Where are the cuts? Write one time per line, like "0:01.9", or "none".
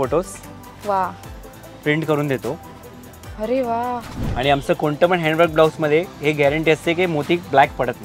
0:04.2